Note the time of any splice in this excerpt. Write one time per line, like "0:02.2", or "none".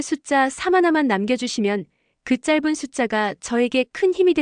none

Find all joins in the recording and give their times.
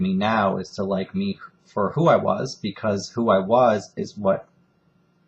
0:02.2

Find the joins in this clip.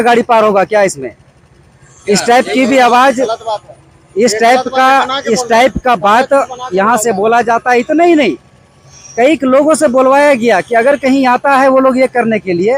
none

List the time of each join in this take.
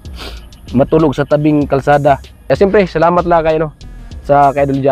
0:02.5

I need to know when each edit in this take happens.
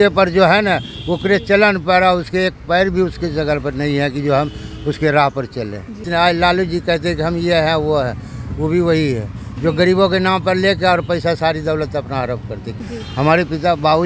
0:06.0
0:12.7

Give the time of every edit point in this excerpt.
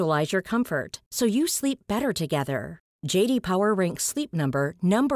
none

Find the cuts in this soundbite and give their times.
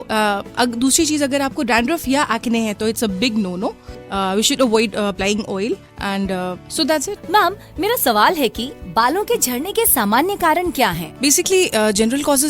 0:07.2
0:08.7

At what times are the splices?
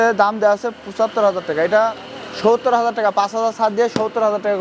none

